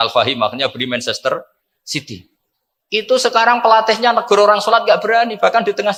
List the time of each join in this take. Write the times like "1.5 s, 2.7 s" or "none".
none